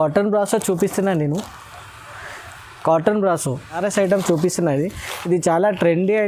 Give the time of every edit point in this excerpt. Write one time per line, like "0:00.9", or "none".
0:03.8

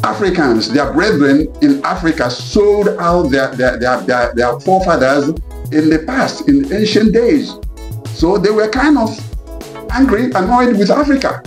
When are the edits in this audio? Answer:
none

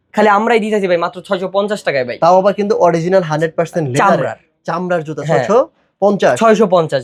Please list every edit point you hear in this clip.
none

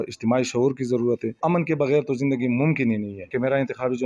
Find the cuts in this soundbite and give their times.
0:01.4
0:03.2

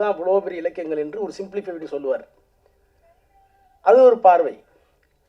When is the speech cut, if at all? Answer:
none

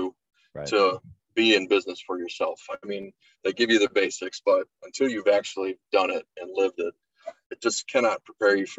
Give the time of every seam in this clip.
0:07.4

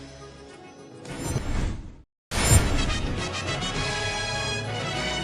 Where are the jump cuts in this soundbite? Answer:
0:02.0

